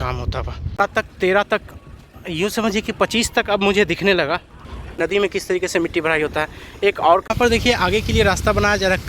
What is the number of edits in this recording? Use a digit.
3